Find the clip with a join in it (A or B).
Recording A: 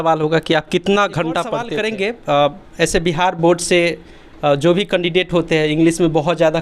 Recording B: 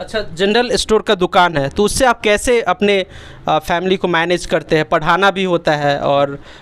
A